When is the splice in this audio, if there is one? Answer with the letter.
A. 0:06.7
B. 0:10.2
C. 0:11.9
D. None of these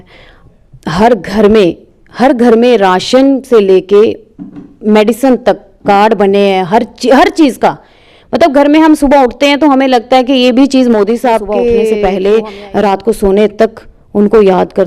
C